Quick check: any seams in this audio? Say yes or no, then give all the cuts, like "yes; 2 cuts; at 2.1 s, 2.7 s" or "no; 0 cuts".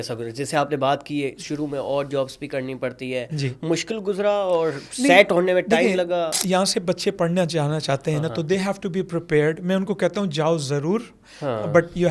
no; 0 cuts